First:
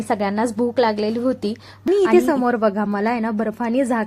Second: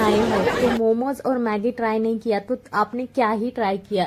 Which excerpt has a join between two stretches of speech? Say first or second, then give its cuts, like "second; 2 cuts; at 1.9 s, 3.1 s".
first; 1 cut; at 1.9 s